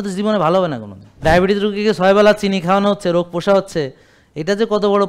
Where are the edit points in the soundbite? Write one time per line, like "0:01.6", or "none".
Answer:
0:01.2